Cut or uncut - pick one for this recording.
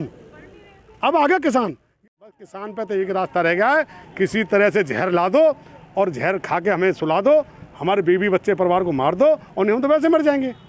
cut